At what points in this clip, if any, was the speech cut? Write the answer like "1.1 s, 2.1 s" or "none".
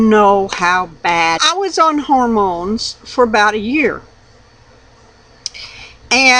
none